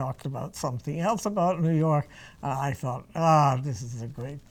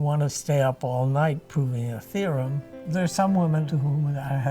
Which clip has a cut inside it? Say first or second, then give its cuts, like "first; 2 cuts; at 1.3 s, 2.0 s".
second; 2 cuts; at 2.7 s, 3.7 s